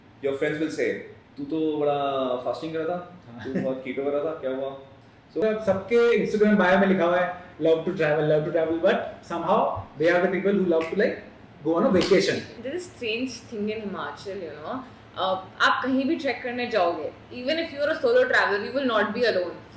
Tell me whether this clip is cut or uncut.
cut